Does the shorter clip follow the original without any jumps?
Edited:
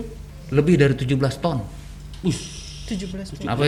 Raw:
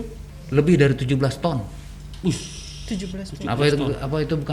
yes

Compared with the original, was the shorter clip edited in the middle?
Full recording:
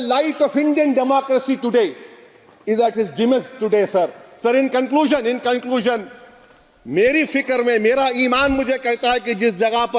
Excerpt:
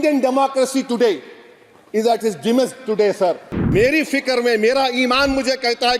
yes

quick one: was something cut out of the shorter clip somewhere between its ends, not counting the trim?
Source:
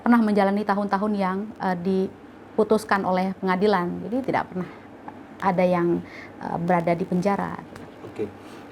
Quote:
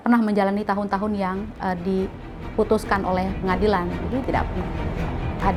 no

